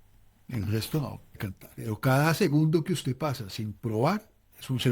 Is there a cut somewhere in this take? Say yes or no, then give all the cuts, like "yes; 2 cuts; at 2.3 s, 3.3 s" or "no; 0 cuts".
yes; 1 cut; at 1.5 s